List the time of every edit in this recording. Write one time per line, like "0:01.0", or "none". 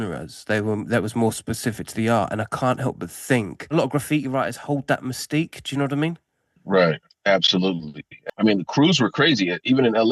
0:03.7
0:08.1